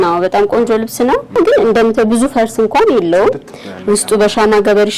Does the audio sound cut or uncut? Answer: cut